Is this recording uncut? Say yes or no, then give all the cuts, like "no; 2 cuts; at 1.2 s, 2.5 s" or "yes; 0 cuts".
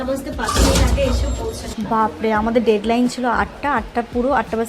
no; 1 cut; at 1.7 s